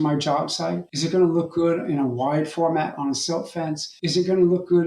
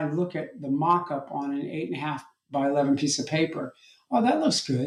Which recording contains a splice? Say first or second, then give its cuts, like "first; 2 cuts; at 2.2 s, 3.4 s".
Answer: first; 2 cuts; at 0.9 s, 3.9 s